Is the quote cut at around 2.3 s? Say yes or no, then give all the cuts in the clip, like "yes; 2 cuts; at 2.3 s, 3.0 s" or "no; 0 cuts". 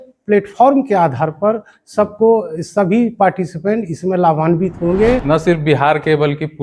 no; 1 cut; at 5.2 s